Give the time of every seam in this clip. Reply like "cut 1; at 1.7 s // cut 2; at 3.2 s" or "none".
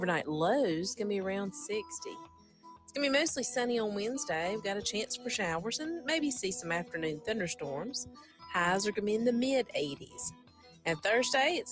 none